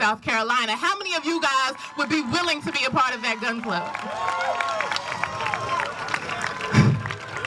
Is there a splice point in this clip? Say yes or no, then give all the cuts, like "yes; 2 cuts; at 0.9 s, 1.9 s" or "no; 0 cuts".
no; 0 cuts